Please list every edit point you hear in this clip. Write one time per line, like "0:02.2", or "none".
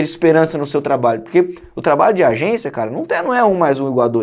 none